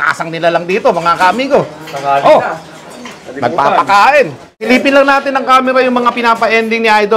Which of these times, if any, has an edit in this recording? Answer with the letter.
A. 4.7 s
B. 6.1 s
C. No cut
A